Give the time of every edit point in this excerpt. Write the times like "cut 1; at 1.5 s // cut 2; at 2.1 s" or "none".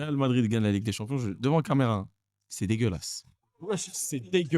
none